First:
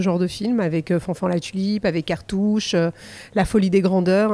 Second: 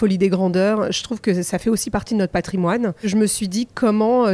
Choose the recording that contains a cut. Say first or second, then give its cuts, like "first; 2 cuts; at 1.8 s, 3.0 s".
second; 1 cut; at 3.1 s